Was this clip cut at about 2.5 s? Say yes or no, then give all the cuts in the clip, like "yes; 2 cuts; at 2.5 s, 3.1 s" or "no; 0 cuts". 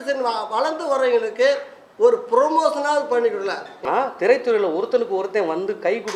no; 1 cut; at 3.8 s